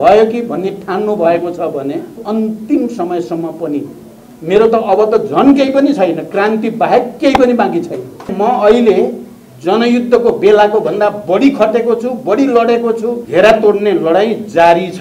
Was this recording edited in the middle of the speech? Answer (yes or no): yes